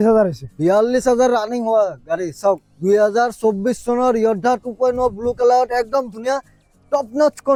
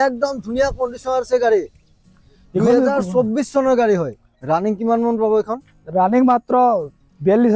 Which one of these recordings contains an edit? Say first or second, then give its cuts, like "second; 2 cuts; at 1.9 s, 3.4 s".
second; 1 cut; at 4.3 s